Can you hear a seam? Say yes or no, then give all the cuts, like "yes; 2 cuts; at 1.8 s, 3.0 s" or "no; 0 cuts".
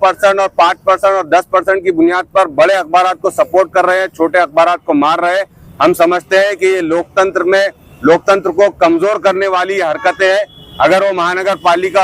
no; 0 cuts